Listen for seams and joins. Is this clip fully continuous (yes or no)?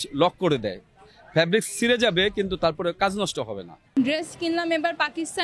yes